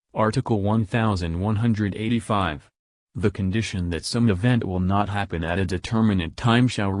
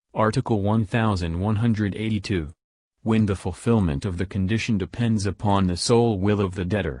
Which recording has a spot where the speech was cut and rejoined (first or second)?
second